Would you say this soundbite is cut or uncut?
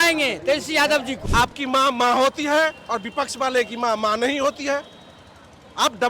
cut